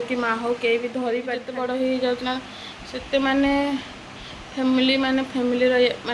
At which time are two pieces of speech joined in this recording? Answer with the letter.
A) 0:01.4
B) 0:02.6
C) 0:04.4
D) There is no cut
A